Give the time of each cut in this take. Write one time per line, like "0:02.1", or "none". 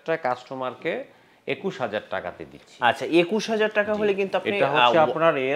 none